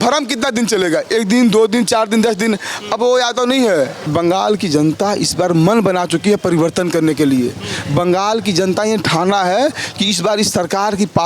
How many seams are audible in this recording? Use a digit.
1